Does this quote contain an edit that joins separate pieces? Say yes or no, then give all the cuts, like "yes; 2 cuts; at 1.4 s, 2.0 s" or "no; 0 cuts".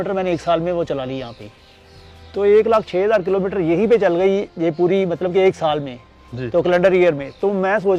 no; 0 cuts